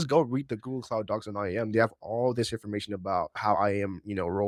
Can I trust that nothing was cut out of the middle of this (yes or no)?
yes